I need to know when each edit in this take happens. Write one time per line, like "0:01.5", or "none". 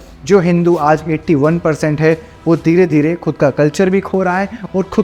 none